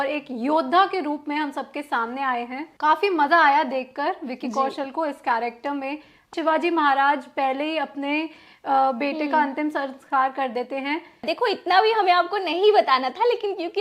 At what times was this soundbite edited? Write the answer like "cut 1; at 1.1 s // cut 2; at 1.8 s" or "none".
cut 1; at 2.6 s // cut 2; at 6.3 s // cut 3; at 11.3 s